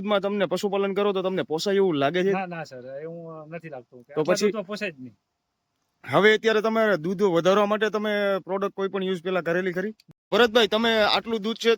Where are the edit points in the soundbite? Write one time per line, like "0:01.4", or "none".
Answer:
none